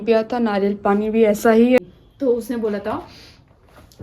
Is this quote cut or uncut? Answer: cut